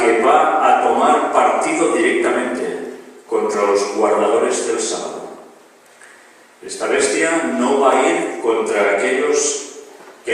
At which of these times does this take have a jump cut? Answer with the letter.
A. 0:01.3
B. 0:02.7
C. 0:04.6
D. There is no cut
B